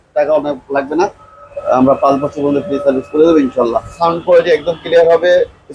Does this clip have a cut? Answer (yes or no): yes